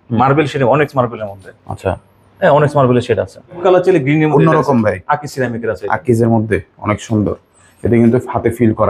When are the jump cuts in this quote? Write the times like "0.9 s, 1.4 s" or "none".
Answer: 3.6 s